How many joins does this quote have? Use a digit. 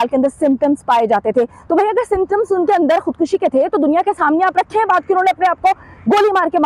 0